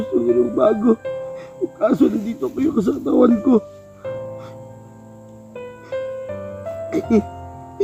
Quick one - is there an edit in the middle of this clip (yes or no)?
no